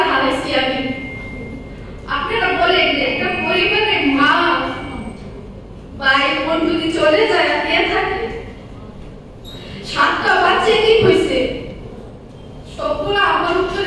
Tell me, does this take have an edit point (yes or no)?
no